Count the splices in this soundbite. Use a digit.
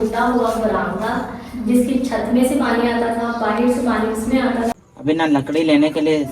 1